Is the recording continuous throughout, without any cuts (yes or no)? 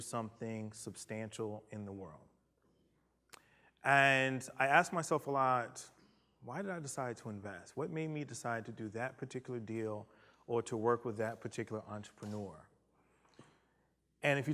no